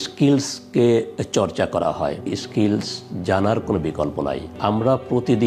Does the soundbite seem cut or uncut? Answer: cut